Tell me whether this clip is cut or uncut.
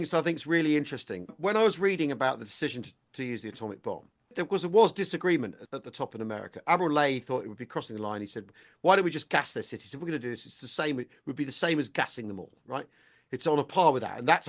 cut